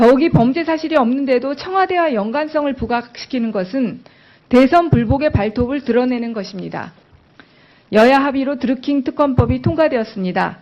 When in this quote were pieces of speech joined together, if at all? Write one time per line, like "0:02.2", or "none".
0:06.5